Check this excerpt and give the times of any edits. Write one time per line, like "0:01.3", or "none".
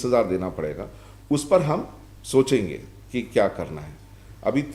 none